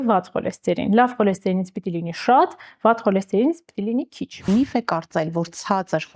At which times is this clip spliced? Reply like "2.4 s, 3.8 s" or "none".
4.5 s